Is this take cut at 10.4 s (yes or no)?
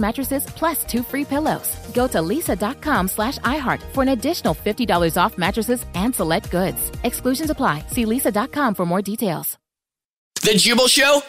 yes